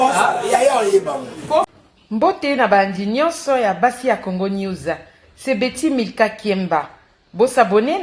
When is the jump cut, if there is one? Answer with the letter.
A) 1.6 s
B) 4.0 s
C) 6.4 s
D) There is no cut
A